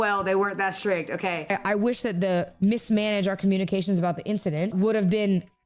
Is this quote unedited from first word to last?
no; 2 cuts; at 1.4 s, 4.7 s

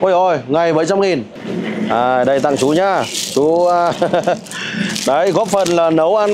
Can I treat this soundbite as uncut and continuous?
no; 1 cut; at 1.3 s

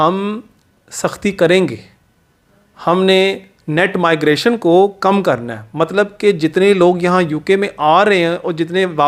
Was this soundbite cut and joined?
no; 0 cuts

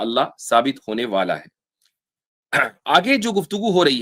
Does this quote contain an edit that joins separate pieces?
no; 0 cuts

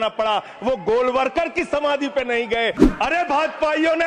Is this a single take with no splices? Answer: no; 1 cut; at 2.8 s

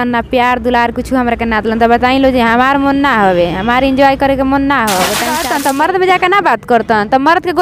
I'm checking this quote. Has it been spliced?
yes; 1 cut; at 5.3 s

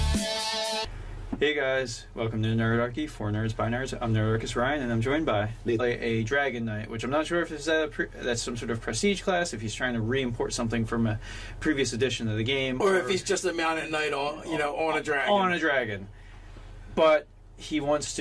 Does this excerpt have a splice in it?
no; 0 cuts

